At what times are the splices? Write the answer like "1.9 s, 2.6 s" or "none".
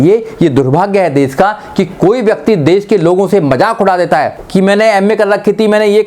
4.4 s

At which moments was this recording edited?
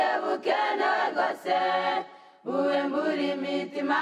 1.7 s

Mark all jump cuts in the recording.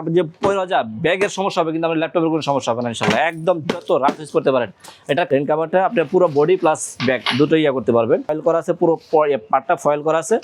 5.3 s, 8.4 s

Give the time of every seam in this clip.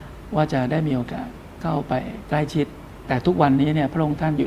2.9 s

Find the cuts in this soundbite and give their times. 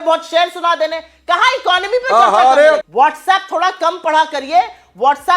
2.8 s

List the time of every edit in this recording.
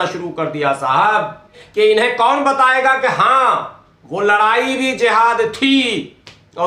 1.6 s

